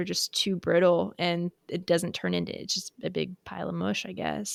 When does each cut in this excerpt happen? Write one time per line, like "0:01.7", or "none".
none